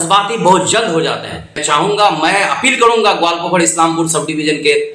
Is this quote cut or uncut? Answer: cut